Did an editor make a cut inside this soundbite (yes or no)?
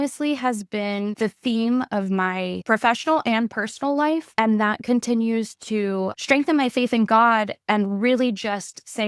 yes